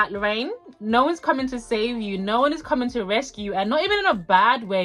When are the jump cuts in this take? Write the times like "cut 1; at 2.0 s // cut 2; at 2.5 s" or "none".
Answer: none